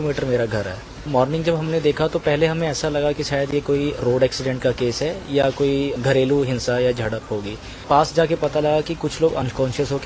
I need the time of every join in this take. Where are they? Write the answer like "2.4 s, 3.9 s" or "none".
1.1 s, 7.8 s